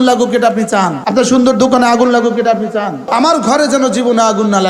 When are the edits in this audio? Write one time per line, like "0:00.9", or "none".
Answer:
0:01.0
0:03.0